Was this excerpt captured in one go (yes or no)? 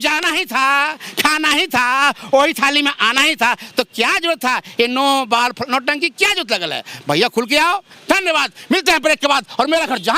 no